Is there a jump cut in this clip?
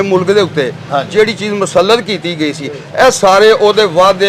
no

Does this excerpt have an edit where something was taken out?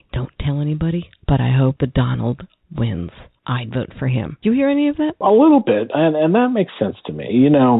yes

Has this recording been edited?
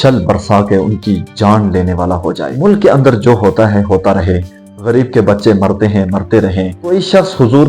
yes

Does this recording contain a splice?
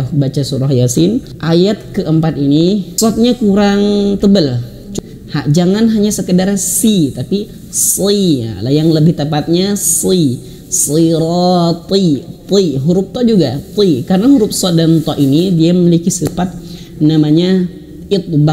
yes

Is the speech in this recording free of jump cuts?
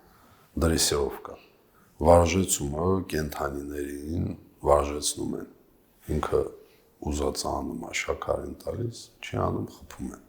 yes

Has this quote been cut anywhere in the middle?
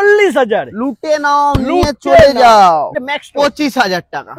yes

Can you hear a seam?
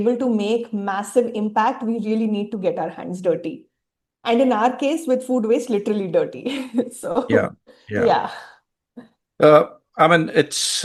no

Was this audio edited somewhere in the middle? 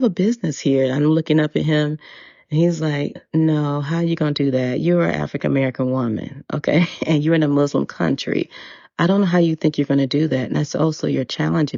no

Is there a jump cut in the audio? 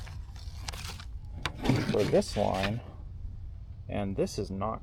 no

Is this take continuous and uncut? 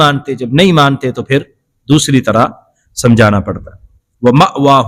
yes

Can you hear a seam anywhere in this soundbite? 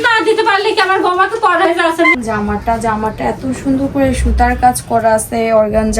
yes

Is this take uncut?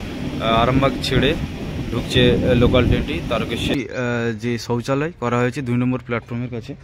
no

